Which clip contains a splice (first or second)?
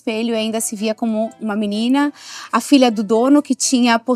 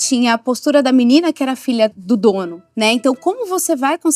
second